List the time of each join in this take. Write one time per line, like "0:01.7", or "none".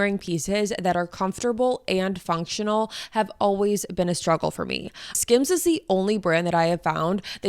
0:05.1